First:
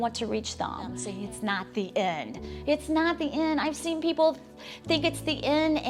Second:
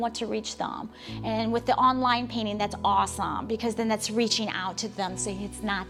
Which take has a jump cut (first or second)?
first